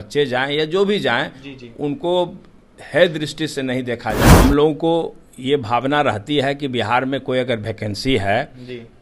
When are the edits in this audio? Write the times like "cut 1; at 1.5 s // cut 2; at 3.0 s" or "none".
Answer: cut 1; at 4.3 s